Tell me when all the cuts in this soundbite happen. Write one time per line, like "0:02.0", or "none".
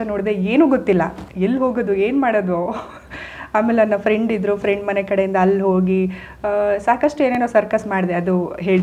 none